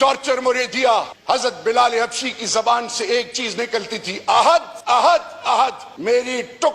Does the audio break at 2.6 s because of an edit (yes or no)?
no